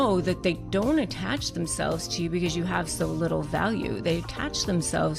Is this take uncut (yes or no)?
yes